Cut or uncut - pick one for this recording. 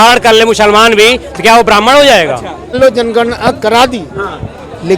cut